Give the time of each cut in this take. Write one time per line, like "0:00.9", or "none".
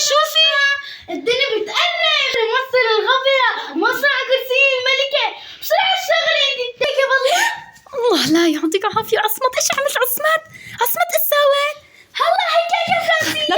0:02.3
0:06.9